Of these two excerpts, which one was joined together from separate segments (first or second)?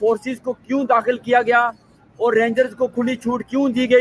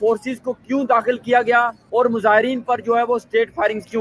second